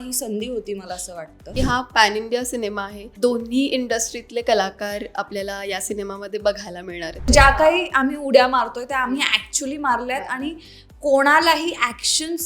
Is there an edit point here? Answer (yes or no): yes